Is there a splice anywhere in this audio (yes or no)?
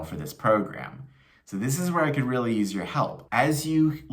yes